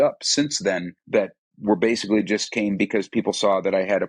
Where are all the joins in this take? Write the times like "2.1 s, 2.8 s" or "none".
0.9 s